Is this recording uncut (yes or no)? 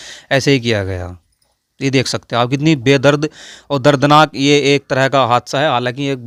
yes